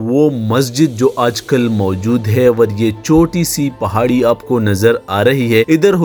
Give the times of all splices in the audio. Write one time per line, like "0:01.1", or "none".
none